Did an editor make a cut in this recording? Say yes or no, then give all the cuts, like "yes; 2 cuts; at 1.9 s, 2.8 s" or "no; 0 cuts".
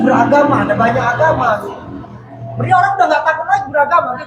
no; 0 cuts